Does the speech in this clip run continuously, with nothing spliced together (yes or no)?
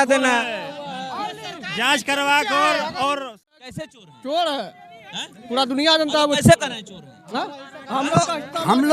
no